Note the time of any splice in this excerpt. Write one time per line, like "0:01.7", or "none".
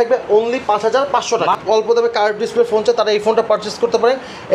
0:01.6